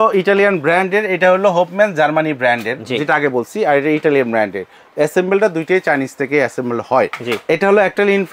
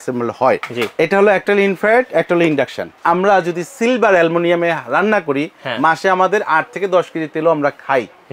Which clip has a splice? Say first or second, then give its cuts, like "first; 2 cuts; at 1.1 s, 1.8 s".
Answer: second; 1 cut; at 2.9 s